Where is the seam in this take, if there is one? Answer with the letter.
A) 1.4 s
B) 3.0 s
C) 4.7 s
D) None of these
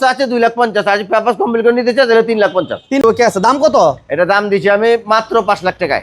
B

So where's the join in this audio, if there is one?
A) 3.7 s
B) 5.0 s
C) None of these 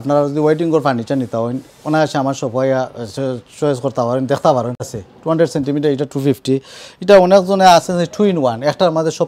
B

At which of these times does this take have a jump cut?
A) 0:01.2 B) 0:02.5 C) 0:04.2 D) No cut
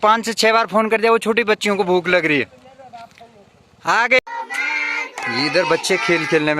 C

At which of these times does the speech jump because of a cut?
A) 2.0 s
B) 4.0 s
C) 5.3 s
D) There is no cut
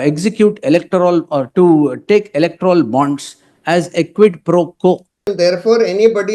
C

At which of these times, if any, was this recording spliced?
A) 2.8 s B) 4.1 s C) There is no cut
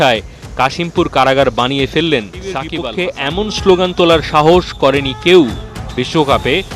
A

